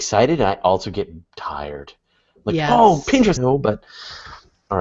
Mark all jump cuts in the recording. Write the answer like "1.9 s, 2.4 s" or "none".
none